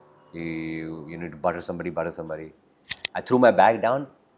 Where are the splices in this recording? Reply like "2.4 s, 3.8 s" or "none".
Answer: 3.0 s